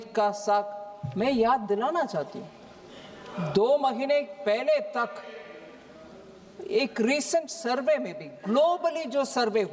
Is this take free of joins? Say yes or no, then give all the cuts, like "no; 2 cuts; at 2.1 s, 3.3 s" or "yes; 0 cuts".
yes; 0 cuts